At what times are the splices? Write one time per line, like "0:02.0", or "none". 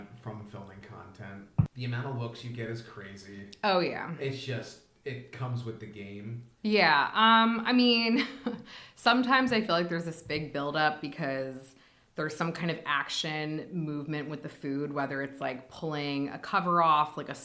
0:01.7
0:06.5